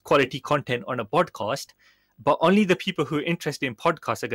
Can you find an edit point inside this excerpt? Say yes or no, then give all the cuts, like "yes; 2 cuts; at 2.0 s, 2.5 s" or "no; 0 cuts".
no; 0 cuts